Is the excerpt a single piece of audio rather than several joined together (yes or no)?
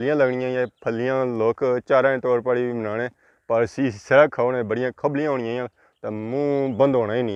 yes